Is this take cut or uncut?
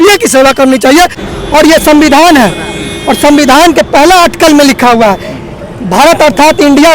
cut